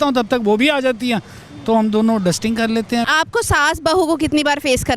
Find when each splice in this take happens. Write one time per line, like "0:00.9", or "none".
0:03.1